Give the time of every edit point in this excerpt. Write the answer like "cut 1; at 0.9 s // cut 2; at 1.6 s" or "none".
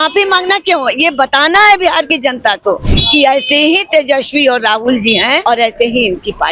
cut 1; at 5.4 s